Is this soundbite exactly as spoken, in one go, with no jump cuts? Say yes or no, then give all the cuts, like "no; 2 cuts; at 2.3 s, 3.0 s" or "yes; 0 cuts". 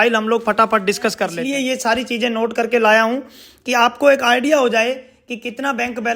no; 1 cut; at 1.4 s